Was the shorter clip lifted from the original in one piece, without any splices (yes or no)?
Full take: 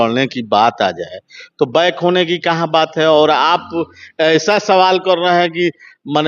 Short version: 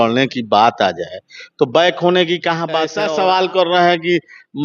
no